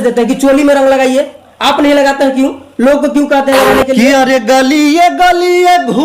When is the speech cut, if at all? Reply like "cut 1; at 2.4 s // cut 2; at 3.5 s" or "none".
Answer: cut 1; at 4.0 s